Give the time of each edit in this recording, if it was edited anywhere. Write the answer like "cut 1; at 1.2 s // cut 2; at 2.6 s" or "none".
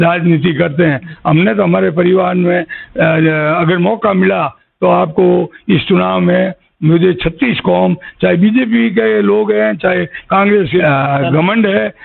cut 1; at 10.8 s